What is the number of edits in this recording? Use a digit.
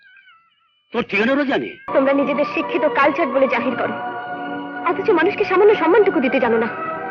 1